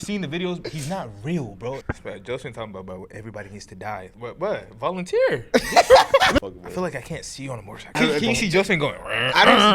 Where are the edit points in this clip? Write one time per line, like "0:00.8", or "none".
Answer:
0:01.9
0:06.4
0:07.9